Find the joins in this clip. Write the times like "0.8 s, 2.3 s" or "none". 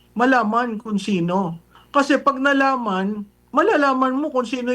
1.7 s